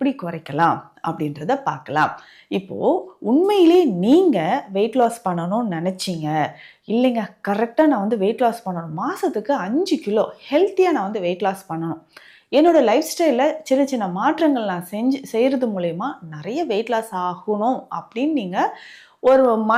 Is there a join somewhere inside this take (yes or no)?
no